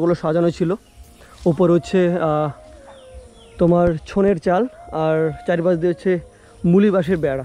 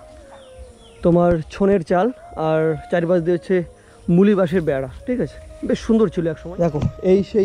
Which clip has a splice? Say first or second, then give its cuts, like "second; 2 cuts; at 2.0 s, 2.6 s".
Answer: second; 1 cut; at 6.4 s